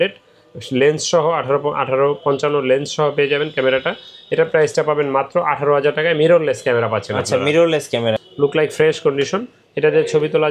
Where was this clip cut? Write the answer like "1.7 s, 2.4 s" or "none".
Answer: 8.3 s